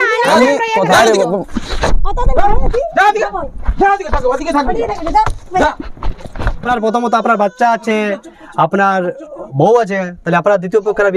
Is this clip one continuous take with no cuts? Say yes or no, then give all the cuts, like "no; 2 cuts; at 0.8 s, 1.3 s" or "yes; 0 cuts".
no; 1 cut; at 6.7 s